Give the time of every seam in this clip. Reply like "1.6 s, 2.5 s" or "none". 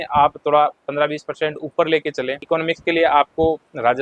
2.4 s